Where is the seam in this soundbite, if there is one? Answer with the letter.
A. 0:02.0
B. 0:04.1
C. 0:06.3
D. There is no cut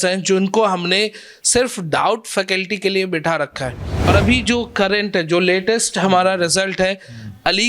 B